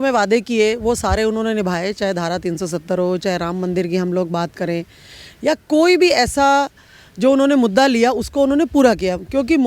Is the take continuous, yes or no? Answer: yes